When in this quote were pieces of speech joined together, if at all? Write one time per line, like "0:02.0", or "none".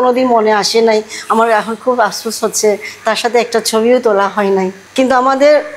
none

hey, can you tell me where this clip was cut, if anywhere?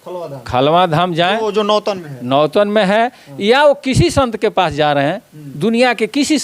none

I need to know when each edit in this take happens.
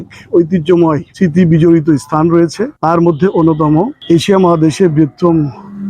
0:01.1
0:02.7
0:04.0

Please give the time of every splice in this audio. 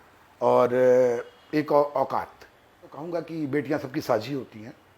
0:03.1

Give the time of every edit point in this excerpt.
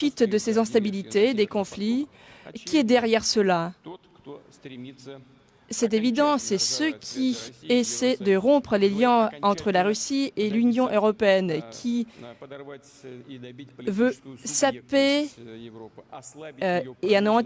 none

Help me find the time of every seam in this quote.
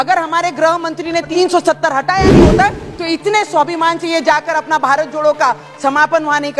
0:01.3

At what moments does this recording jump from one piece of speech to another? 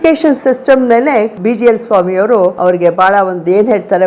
0:01.3
0:02.6

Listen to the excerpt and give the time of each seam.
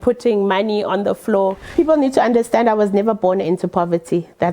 0:01.7

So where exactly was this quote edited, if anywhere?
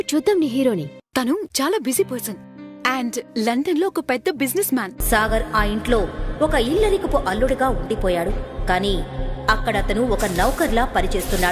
0:01.0
0:04.9

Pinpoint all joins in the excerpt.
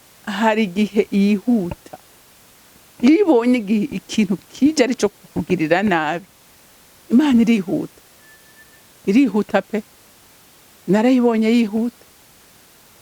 none

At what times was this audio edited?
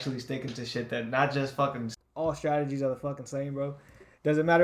0:01.9

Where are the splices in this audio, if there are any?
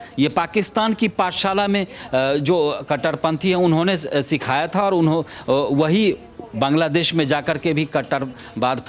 none

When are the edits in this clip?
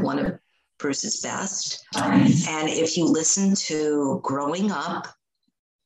0:01.9

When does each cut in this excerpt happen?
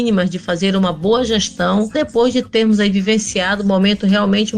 0:01.9

